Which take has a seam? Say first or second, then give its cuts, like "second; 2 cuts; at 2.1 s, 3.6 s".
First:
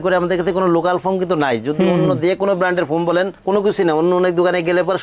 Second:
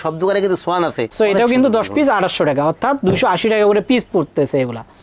second; 1 cut; at 1.0 s